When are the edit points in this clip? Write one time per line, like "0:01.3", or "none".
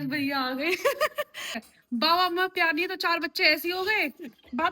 0:01.6